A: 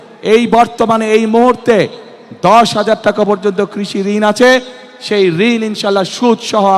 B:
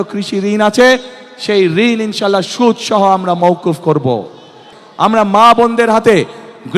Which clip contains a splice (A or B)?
B